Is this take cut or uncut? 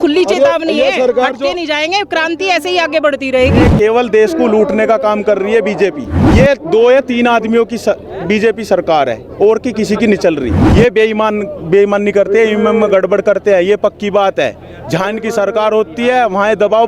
cut